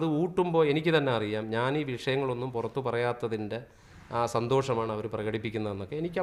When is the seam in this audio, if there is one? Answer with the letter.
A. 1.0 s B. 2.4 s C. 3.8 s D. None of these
D